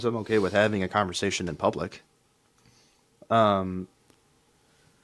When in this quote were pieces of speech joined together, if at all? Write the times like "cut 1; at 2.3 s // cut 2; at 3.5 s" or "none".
none